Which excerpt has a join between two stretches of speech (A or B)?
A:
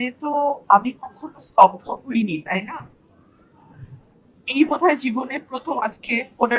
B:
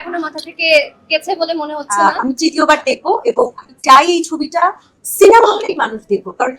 B